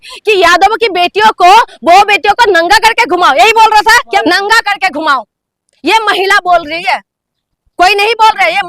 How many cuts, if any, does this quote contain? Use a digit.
1